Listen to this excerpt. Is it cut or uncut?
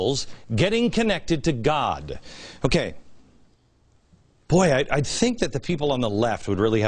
cut